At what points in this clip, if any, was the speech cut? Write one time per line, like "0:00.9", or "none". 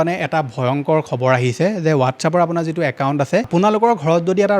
0:03.5